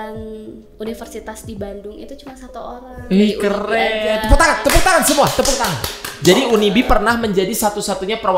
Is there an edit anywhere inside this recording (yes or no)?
no